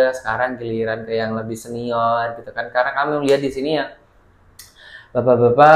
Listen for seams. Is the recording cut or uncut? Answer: uncut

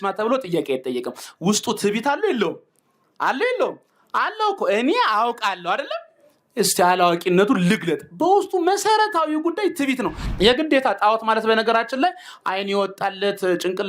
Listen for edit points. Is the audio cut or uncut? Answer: cut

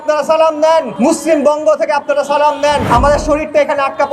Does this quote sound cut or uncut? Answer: cut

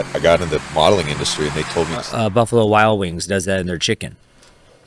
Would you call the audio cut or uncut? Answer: cut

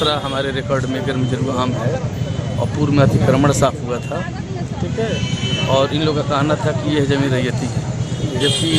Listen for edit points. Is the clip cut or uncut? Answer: uncut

